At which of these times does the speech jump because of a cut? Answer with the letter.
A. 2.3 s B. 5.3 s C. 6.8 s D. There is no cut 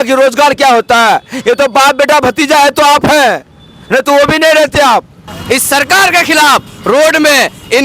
B